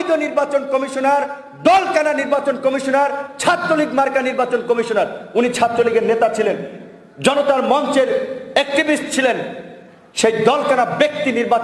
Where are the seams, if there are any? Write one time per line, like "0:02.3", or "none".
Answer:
none